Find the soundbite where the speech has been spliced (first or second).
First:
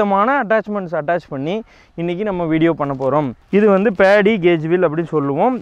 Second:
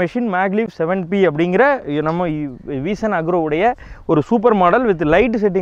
first